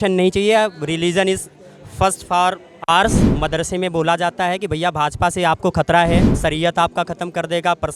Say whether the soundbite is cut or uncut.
cut